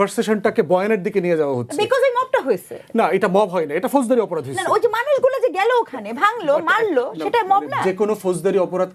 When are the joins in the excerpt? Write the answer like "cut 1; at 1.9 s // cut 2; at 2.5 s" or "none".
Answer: none